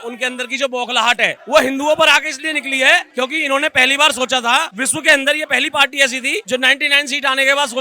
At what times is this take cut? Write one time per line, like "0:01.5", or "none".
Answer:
0:03.1
0:04.8
0:06.4